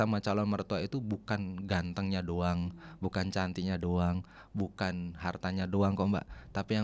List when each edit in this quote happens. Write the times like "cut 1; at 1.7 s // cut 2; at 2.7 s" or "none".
none